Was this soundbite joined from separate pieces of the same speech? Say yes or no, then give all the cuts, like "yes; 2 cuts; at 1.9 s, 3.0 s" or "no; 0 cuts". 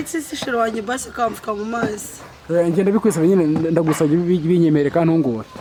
no; 0 cuts